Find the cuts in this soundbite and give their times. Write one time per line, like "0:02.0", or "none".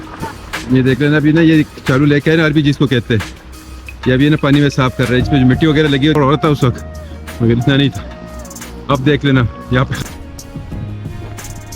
0:06.2
0:09.9